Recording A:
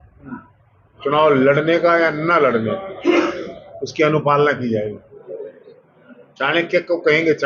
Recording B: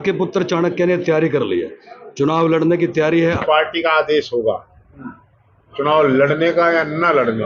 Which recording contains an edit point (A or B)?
B